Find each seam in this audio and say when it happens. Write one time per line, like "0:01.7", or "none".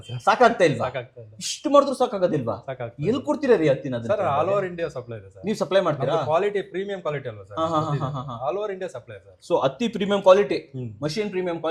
none